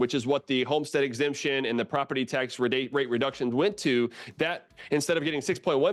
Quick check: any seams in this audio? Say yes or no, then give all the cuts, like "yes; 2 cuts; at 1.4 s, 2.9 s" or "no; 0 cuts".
no; 0 cuts